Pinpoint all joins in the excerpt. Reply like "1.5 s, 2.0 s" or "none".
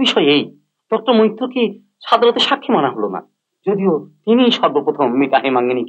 none